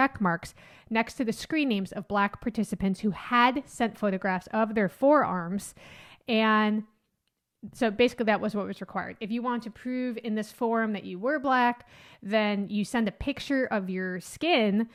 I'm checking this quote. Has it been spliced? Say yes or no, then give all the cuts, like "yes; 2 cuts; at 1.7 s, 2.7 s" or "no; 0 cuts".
no; 0 cuts